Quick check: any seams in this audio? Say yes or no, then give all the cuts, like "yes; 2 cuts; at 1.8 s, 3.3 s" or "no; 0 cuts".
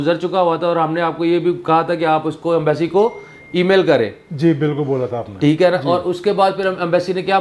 no; 0 cuts